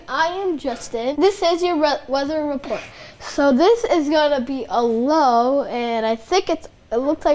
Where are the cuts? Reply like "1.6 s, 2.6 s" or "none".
1.1 s